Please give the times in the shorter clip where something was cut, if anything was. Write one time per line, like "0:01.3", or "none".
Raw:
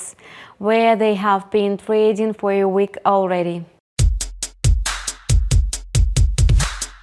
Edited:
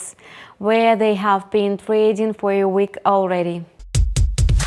0:03.8